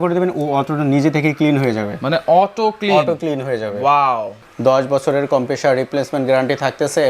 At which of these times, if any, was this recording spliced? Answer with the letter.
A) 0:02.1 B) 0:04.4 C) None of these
B